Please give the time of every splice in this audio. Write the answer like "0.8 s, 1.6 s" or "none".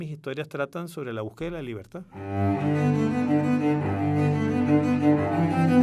2.0 s